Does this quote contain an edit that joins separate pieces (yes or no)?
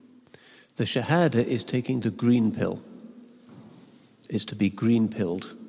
no